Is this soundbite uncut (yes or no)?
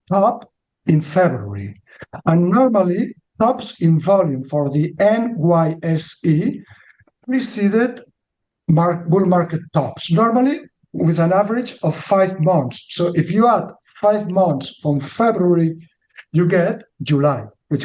yes